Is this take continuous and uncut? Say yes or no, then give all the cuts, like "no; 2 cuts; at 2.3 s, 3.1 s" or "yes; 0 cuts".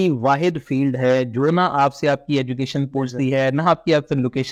yes; 0 cuts